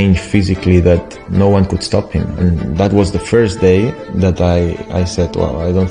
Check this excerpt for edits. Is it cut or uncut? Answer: uncut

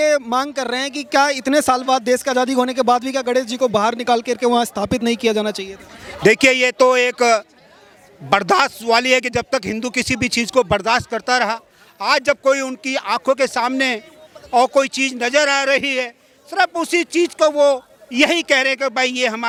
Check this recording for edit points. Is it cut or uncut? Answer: uncut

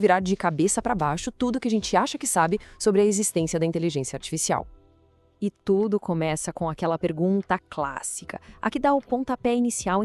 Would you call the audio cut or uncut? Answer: cut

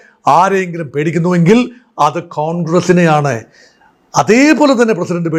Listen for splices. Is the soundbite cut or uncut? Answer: uncut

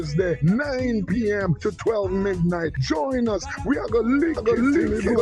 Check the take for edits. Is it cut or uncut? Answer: uncut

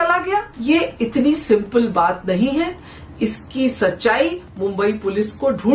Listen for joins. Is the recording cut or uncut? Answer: uncut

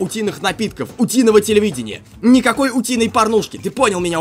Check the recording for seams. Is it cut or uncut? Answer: uncut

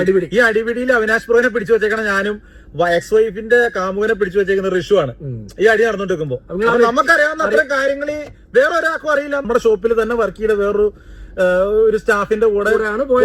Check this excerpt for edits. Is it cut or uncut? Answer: cut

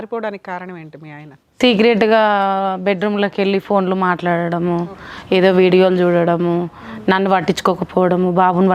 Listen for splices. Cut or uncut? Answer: uncut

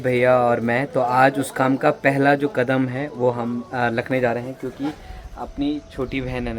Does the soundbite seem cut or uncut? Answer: uncut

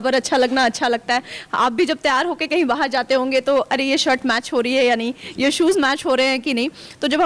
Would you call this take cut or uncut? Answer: uncut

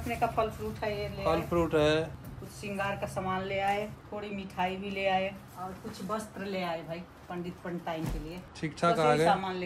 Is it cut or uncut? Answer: cut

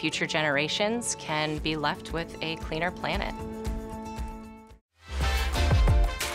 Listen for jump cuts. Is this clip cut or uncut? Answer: uncut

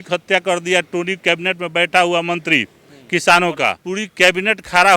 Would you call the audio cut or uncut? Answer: cut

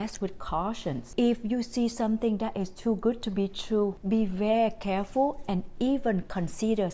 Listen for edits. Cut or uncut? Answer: cut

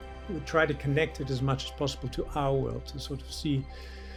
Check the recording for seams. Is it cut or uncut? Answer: uncut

